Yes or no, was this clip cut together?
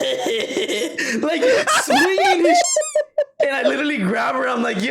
no